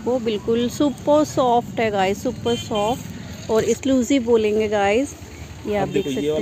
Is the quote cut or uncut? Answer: cut